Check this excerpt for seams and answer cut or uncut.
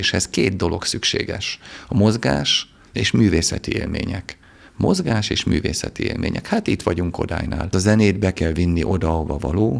cut